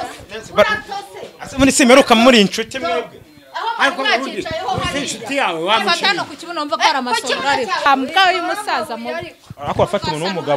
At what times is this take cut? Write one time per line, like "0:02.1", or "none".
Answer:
0:07.9